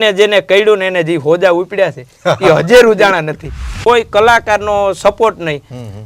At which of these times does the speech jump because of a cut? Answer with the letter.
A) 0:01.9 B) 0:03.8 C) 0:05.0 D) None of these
B